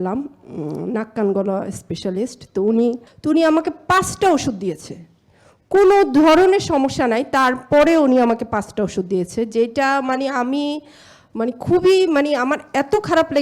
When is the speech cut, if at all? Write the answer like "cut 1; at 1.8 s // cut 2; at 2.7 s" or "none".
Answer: cut 1; at 3.1 s